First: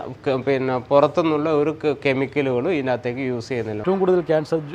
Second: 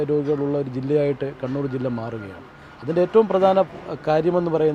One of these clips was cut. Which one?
first; 1 cut; at 3.8 s

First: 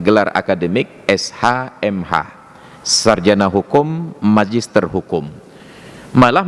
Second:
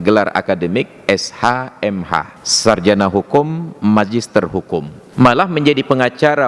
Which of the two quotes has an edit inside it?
second; 2 cuts; at 2.4 s, 5.0 s

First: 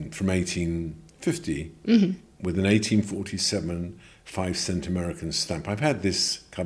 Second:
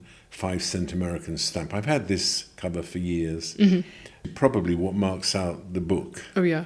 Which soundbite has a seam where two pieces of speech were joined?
second; 1 cut; at 4.2 s

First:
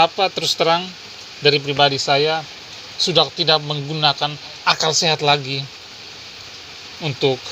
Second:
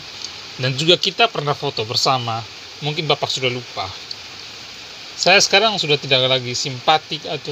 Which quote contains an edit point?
first; 1 cut; at 4.5 s

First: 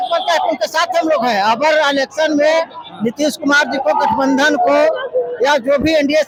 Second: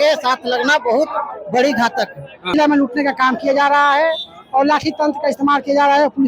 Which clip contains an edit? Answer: second; 1 cut; at 2.5 s

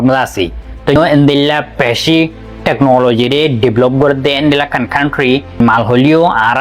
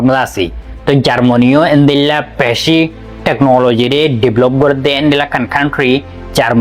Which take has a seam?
first; 2 cuts; at 1.0 s, 5.6 s

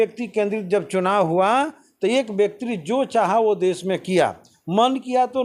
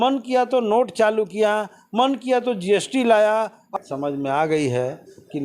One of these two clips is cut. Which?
second; 1 cut; at 3.7 s

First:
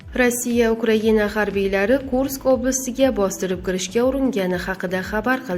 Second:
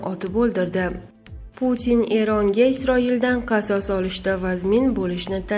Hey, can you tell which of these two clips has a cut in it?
second; 1 cut; at 1.1 s

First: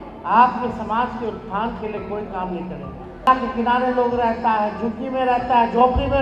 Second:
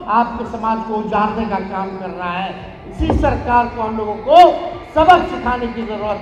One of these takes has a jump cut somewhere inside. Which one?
first; 1 cut; at 3.3 s

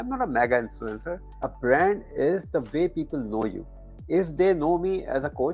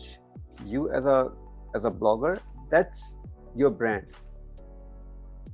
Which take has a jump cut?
first; 2 cuts; at 1.5 s, 3.9 s

